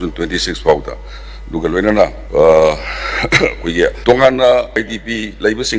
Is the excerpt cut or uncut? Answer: cut